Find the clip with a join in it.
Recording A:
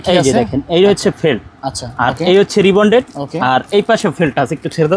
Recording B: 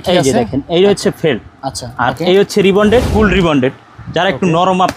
B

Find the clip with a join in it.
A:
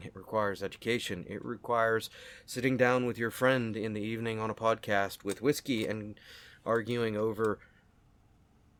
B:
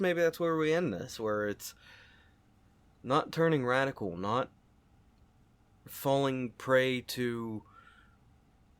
B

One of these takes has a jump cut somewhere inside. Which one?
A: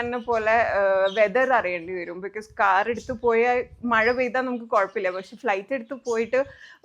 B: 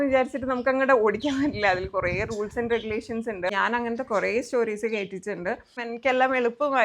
B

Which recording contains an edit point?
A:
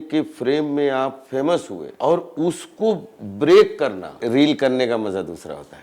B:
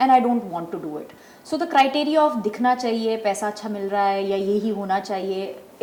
A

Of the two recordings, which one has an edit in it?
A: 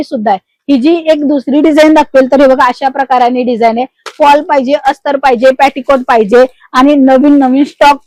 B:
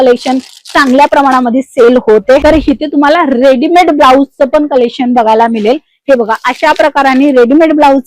B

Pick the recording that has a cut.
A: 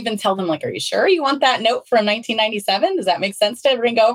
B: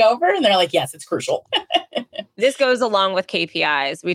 B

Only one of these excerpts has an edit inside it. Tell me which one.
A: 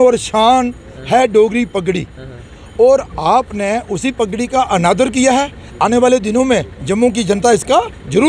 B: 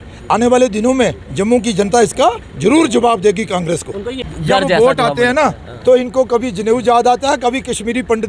B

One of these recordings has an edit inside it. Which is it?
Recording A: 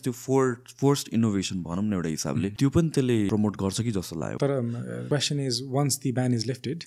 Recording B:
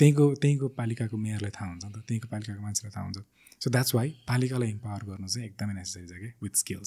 A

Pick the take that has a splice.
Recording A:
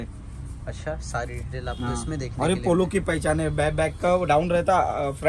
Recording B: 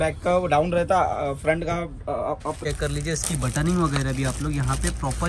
B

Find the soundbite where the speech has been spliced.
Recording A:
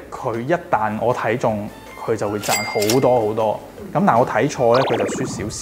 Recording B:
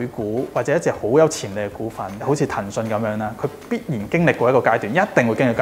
B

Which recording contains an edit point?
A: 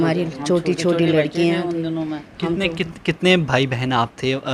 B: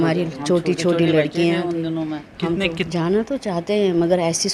B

